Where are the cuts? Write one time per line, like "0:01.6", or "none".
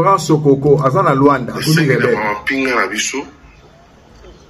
none